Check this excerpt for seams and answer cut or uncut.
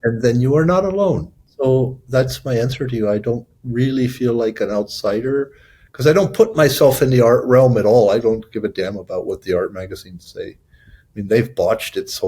cut